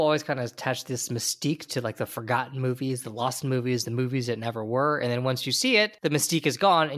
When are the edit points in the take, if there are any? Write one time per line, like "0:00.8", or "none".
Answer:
0:05.9